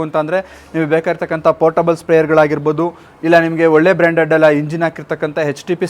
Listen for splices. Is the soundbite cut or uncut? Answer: uncut